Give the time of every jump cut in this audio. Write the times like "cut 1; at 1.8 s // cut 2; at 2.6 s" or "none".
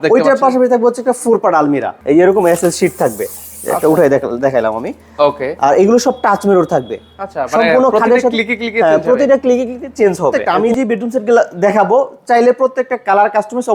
cut 1; at 1.9 s // cut 2; at 10.5 s